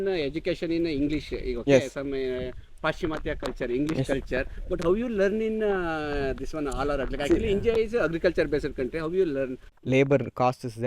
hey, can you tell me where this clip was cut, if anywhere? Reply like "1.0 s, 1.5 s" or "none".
9.7 s